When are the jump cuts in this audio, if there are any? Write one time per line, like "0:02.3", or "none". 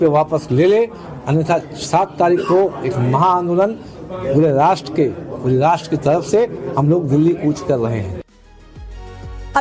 0:07.8